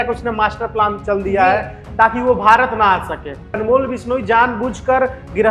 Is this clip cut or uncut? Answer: cut